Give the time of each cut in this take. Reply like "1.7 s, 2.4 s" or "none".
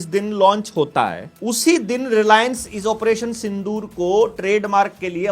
1.3 s